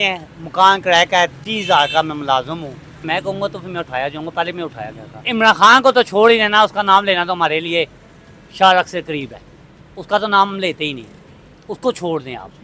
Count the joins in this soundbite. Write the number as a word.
two